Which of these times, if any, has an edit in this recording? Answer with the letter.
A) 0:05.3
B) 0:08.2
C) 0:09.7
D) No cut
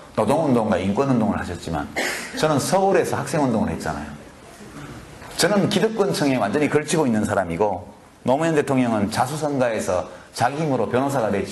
A